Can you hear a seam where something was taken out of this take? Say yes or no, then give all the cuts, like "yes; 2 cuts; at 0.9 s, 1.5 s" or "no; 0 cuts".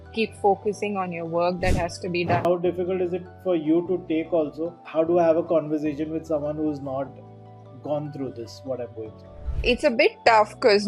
yes; 2 cuts; at 2.4 s, 4.7 s